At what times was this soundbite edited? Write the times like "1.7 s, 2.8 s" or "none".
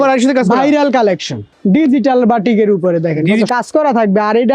1.5 s, 3.5 s